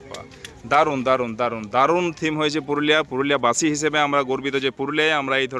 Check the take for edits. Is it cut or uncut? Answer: uncut